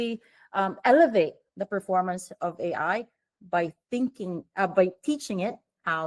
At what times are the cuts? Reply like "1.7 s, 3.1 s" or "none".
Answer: none

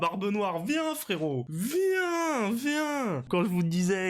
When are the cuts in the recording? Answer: 1.5 s, 3.3 s

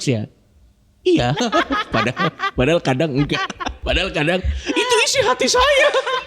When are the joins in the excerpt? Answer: 3.8 s

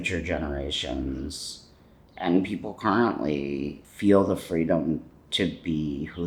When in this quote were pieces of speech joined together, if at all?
3.8 s

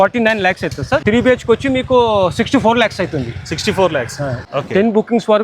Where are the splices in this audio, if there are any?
1.0 s, 4.4 s

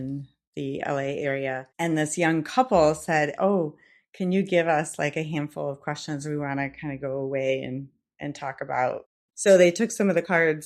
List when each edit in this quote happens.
1.7 s, 9.1 s

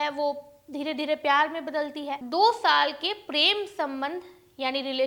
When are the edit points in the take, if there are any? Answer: 2.2 s

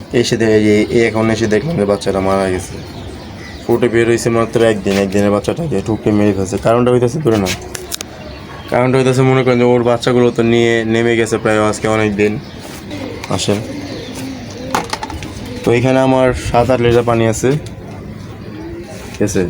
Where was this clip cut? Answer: 12.8 s

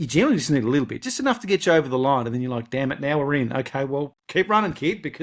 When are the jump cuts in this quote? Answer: 4.2 s

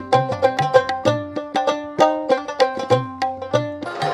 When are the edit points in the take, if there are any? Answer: 0.9 s

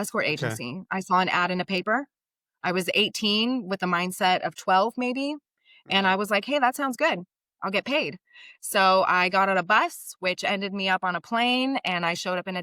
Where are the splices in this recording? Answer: none

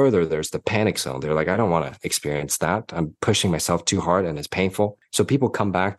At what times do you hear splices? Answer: 5.0 s

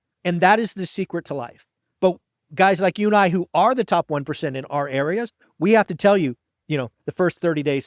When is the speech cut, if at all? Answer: 6.5 s

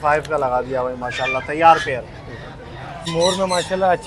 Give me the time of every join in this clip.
3.0 s

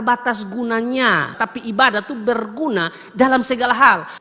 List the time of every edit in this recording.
1.4 s

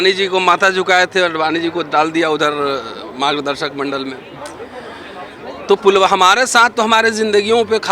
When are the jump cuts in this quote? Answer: none

